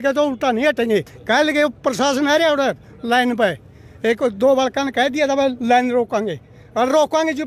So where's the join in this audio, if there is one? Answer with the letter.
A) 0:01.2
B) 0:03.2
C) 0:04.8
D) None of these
A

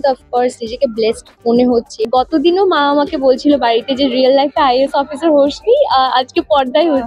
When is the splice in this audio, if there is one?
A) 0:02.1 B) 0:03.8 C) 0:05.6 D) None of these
A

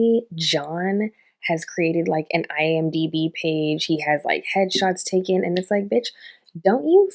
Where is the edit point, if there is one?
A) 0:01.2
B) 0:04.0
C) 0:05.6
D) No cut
D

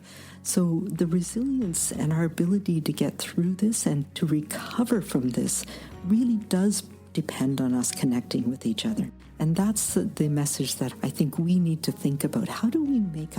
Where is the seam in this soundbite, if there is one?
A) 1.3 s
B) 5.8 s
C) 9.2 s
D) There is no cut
C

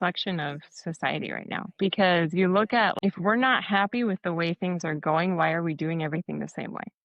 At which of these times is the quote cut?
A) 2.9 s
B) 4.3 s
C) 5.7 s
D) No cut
A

